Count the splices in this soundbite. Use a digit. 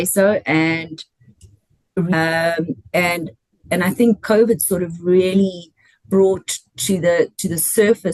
1